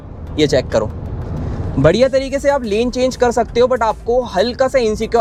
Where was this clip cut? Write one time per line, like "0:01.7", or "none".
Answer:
none